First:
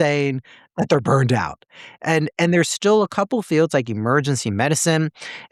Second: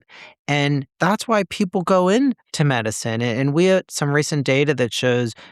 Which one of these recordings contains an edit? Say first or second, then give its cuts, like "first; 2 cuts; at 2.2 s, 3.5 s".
second; 1 cut; at 2.5 s